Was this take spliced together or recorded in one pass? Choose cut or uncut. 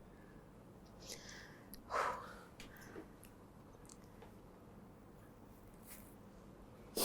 cut